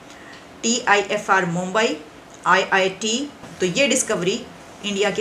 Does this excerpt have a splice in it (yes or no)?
yes